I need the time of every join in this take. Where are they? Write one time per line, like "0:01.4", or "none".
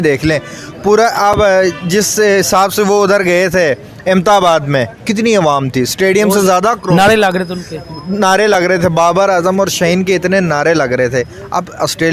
none